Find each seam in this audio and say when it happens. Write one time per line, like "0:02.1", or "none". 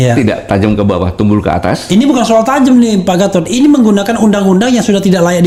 none